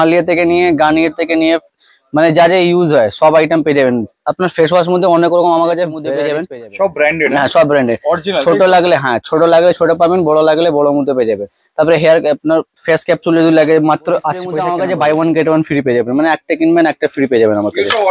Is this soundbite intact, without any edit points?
no; 2 cuts; at 6.2 s, 14.5 s

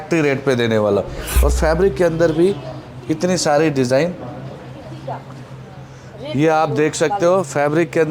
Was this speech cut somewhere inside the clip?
yes; 1 cut; at 1.3 s

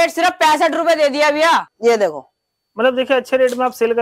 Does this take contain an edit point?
yes; 1 cut; at 1.7 s

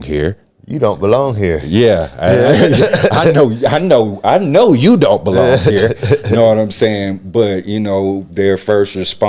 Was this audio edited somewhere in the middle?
no; 0 cuts

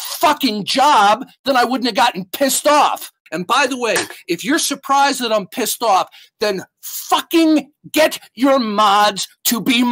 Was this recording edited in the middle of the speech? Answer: yes; 1 cut; at 3.2 s

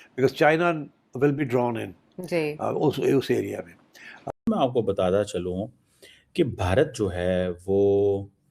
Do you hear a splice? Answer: yes; 1 cut; at 4.3 s

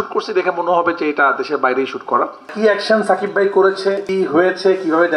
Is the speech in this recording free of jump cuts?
no; 2 cuts; at 2.5 s, 4.0 s

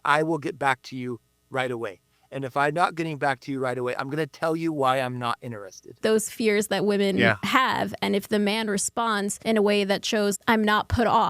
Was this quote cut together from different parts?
yes; 3 cuts; at 6.0 s, 9.3 s, 10.4 s

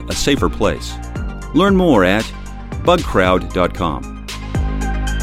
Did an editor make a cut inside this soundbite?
yes; 1 cut; at 4.3 s

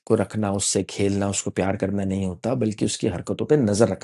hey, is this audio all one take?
yes; 0 cuts

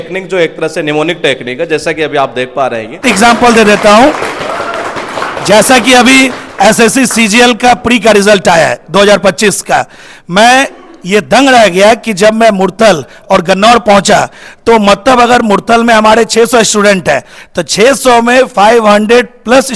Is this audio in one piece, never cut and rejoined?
no; 1 cut; at 3.0 s

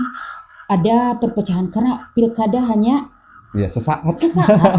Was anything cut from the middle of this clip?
no; 0 cuts

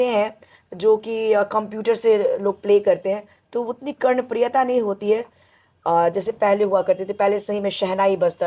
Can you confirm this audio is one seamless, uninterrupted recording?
yes; 0 cuts

